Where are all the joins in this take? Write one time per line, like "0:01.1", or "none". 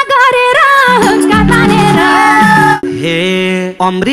0:02.8